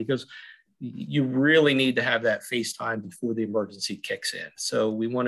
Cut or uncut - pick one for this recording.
uncut